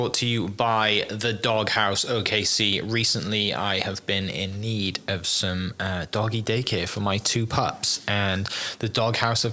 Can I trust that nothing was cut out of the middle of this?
yes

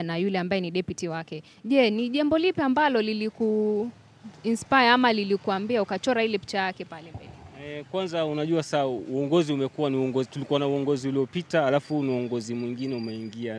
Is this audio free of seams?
yes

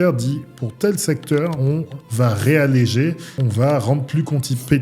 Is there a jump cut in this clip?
yes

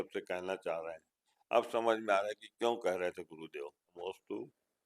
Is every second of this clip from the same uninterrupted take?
no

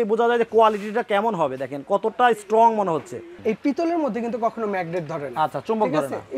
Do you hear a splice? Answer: yes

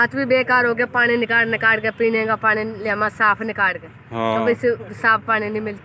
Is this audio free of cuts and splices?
yes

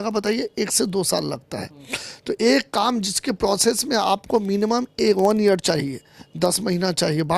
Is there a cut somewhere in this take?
no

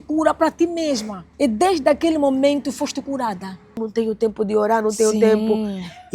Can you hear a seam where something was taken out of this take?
yes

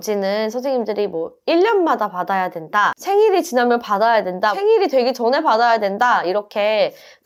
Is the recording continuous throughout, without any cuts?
yes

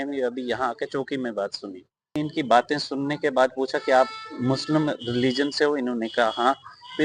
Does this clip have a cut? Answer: yes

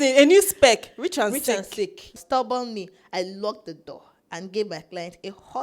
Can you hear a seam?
yes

